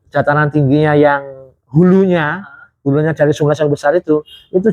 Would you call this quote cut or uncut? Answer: uncut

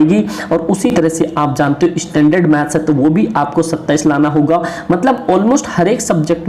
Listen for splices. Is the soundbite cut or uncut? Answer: uncut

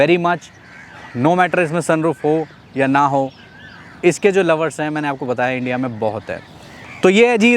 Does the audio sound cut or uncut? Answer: uncut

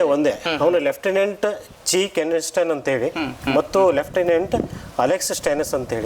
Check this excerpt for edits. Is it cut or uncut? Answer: uncut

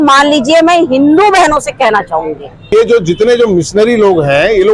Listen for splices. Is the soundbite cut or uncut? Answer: cut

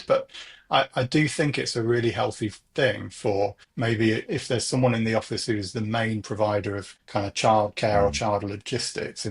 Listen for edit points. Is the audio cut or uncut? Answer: cut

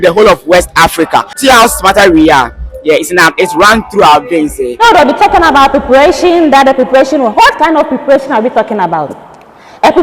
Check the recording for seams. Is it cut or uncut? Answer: cut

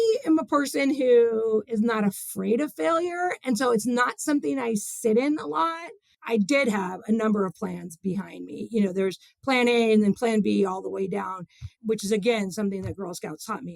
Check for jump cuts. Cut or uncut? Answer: cut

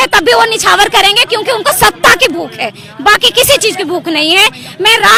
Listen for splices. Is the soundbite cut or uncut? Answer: uncut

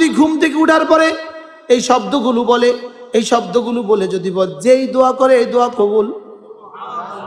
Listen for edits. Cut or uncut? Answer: uncut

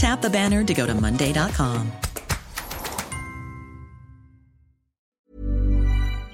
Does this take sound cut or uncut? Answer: cut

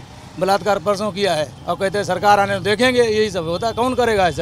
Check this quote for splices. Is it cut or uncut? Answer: cut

